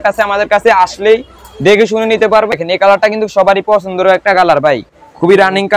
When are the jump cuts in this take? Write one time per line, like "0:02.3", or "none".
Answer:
0:02.6